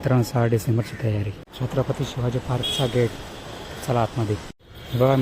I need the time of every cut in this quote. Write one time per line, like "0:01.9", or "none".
0:01.4